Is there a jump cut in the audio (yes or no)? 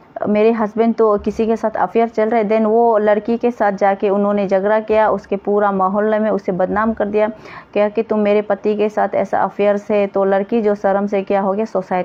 no